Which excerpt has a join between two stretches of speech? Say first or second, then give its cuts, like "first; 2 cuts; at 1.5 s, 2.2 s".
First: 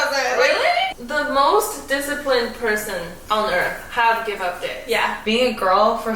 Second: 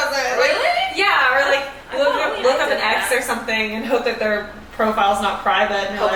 first; 3 cuts; at 0.9 s, 3.1 s, 5.2 s